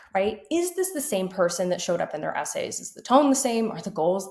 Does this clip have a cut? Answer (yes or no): no